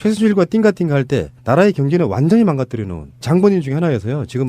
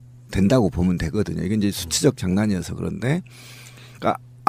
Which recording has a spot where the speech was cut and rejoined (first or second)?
first